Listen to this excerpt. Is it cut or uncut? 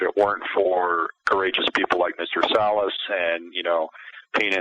cut